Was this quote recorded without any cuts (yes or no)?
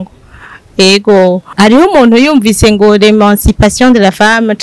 no